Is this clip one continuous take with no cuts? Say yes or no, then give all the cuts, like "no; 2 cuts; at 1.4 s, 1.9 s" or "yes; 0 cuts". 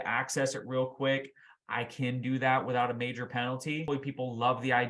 no; 1 cut; at 3.8 s